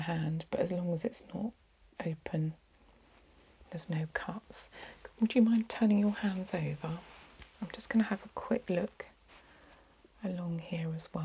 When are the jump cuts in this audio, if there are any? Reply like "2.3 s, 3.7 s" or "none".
none